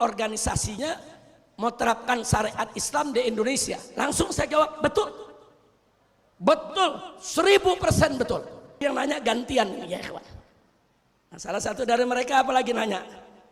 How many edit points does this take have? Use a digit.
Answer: 1